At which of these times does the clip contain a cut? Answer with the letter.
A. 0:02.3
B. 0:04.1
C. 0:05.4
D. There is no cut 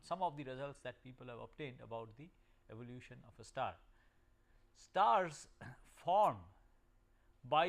C